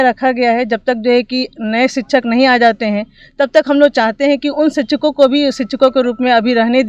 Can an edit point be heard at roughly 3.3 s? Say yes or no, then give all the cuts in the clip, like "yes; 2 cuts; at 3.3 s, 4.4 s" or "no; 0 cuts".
no; 0 cuts